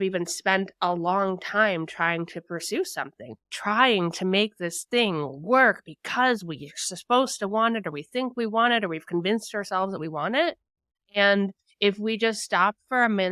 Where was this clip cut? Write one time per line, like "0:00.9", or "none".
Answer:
0:03.5